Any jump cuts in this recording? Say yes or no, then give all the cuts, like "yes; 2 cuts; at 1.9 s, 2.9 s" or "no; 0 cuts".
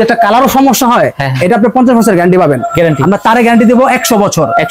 no; 0 cuts